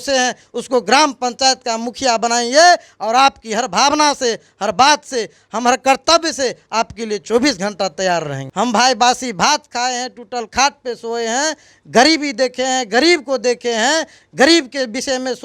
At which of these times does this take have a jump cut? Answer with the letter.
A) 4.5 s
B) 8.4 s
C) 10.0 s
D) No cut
B